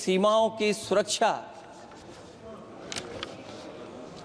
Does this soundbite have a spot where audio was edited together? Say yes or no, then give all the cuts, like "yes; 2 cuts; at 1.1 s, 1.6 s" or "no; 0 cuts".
no; 0 cuts